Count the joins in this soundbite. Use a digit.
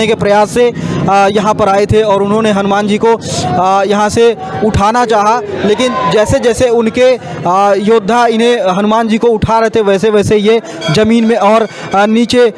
0